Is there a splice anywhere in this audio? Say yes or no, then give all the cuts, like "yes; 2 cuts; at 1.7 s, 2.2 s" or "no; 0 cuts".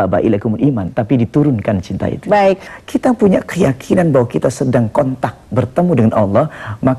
yes; 1 cut; at 2.7 s